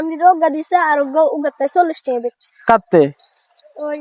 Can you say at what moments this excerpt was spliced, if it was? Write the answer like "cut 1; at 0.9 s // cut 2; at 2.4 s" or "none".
none